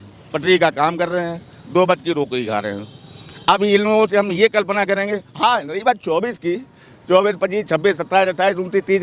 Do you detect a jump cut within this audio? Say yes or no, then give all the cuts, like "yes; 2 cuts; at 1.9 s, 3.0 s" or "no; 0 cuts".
no; 0 cuts